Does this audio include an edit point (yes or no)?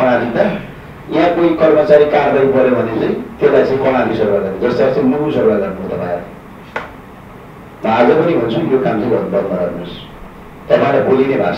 no